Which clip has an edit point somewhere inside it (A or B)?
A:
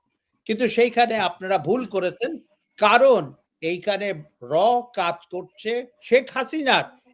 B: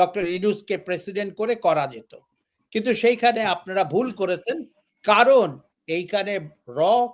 A